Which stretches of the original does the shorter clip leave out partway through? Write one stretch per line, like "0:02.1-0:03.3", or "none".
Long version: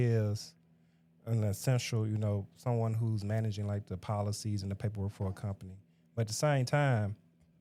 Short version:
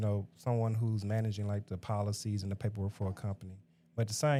none